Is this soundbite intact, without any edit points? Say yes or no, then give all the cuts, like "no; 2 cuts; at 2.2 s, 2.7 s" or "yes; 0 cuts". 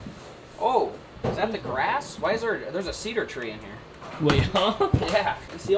yes; 0 cuts